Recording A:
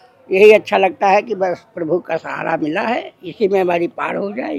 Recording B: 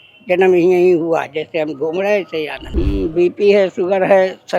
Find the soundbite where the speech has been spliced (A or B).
B